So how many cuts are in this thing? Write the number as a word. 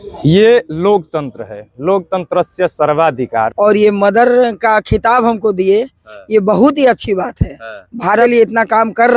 two